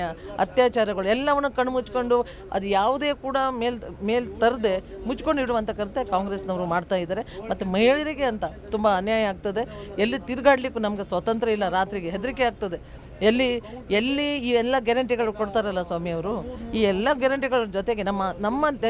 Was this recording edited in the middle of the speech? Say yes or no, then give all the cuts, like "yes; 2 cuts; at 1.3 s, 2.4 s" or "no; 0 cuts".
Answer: no; 0 cuts